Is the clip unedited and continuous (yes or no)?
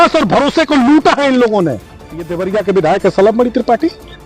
no